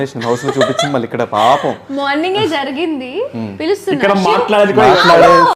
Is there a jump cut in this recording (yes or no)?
no